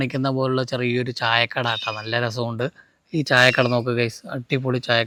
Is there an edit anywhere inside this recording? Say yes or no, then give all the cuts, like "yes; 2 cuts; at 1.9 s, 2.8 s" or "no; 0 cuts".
no; 0 cuts